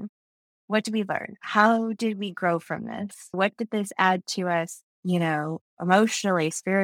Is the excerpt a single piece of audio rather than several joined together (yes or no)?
no